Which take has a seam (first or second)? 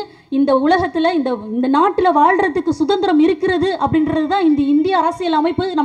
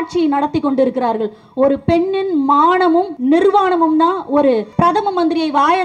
second